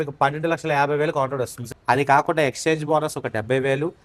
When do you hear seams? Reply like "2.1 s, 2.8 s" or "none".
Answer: 1.6 s